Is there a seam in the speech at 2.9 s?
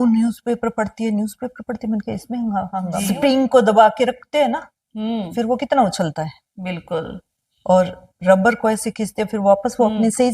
yes; 1 cut; at 2.9 s

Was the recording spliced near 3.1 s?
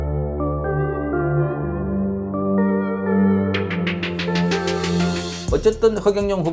no; 1 cut; at 5.3 s

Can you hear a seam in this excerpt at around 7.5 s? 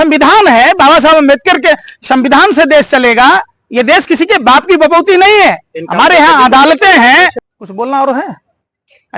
yes; 1 cut; at 7.5 s

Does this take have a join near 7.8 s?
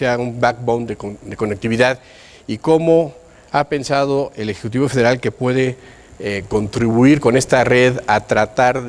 yes; 1 cut; at 7.8 s

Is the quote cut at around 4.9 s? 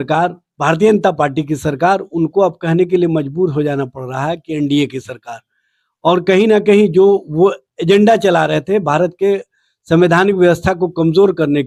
no; 0 cuts

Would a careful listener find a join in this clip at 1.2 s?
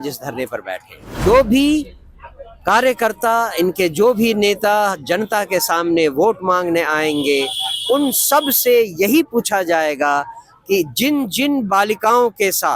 yes; 1 cut; at 1.2 s

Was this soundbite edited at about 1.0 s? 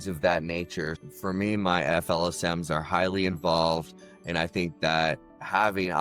yes; 1 cut; at 1.0 s

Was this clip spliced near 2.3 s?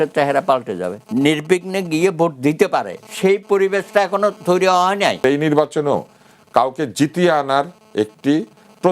no; 2 cuts; at 1.0 s, 5.2 s

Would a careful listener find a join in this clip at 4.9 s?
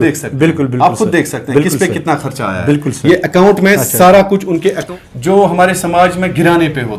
yes; 1 cut; at 4.9 s

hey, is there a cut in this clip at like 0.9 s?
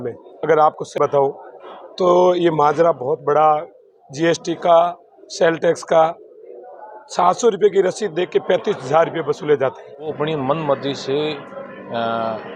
yes; 2 cuts; at 0.9 s, 10.2 s

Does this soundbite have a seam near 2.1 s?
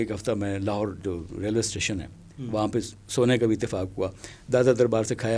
no; 0 cuts

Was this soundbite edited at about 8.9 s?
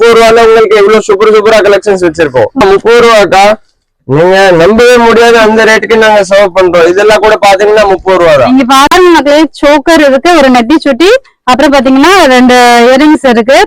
yes; 2 cuts; at 2.6 s, 8.9 s

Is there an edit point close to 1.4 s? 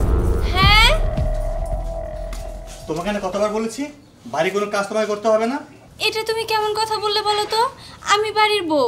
no; 0 cuts

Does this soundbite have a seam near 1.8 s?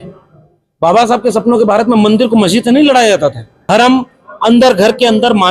no; 1 cut; at 3.5 s

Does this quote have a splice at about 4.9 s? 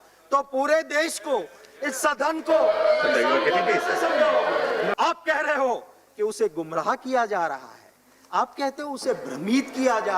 yes; 1 cut; at 4.9 s

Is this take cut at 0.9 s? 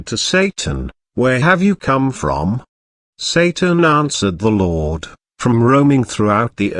yes; 1 cut; at 0.9 s

